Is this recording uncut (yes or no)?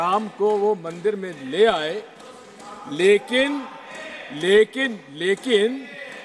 yes